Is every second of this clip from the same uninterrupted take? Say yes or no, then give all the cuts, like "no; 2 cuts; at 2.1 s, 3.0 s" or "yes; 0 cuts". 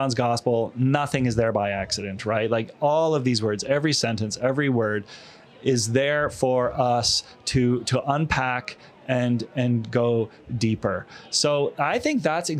yes; 0 cuts